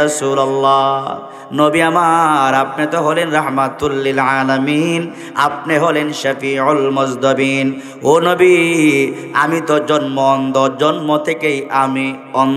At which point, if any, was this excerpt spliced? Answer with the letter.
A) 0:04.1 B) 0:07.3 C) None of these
C